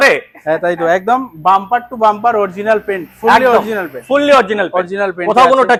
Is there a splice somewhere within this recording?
no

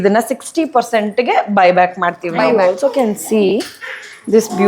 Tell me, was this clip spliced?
yes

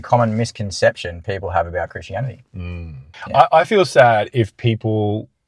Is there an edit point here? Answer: yes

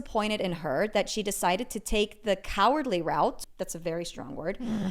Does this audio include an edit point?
yes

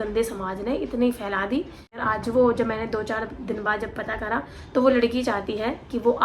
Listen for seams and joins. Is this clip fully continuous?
no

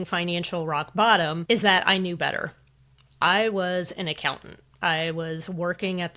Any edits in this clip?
yes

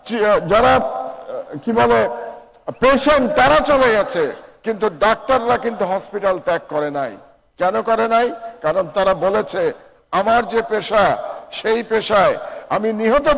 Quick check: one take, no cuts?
yes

